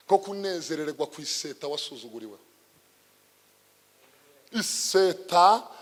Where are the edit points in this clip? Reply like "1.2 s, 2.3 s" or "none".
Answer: none